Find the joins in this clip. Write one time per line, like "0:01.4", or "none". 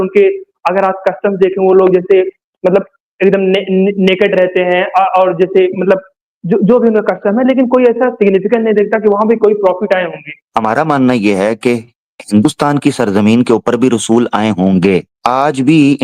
0:10.3
0:15.1